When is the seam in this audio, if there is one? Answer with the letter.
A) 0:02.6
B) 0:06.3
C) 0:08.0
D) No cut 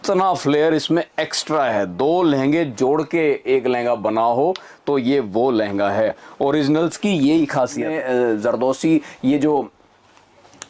C